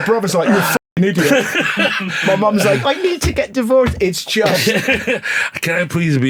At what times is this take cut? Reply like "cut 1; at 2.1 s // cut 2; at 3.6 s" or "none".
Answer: none